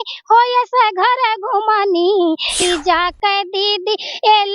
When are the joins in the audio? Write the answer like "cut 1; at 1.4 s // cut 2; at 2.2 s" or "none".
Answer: cut 1; at 2.5 s